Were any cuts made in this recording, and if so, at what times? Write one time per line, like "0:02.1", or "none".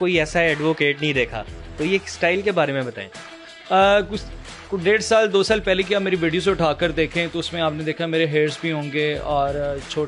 none